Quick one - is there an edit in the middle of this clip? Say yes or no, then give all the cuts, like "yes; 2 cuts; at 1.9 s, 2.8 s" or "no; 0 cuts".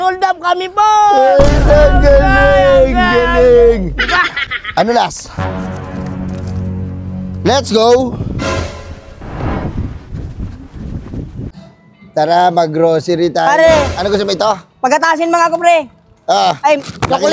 no; 0 cuts